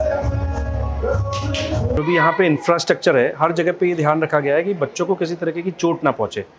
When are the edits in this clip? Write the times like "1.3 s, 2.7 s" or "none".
2.0 s